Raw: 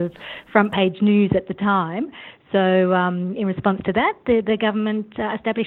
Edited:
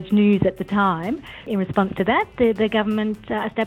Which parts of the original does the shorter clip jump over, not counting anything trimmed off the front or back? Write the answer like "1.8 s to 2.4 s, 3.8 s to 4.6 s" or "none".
2.3 s to 3.3 s